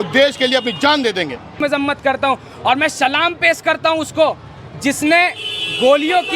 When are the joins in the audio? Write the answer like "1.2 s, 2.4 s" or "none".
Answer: 1.6 s